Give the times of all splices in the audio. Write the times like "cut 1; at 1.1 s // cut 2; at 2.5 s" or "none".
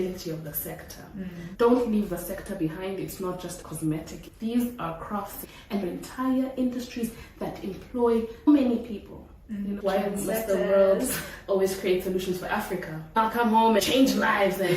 cut 1; at 1.4 s // cut 2; at 9.8 s // cut 3; at 13.2 s